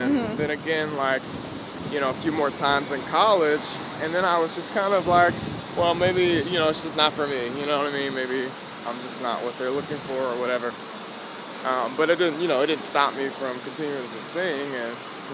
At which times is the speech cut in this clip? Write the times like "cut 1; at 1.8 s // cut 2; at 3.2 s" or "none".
none